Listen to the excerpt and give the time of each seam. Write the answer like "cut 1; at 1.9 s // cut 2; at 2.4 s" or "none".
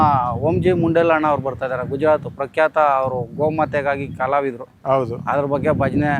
none